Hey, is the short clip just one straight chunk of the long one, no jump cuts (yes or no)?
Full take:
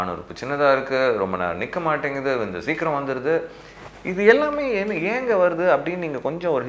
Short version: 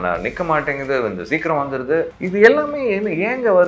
no